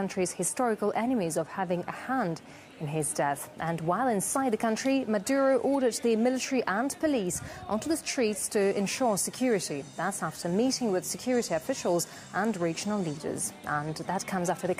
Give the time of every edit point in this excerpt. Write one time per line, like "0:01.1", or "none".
none

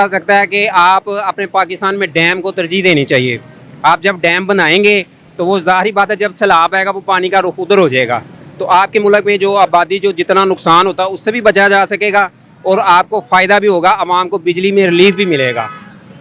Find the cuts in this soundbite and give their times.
none

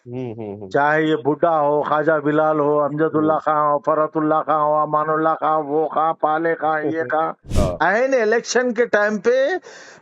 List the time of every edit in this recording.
0:07.4

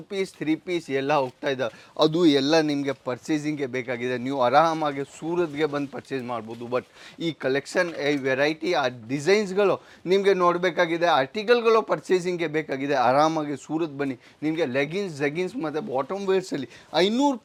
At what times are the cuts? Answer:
none

